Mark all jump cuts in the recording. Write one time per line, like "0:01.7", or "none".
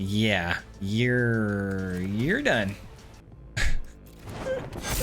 0:03.2